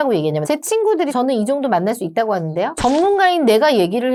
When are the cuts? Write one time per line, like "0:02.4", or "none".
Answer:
none